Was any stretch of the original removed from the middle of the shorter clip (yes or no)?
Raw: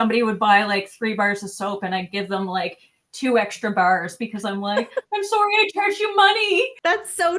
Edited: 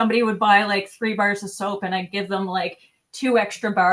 no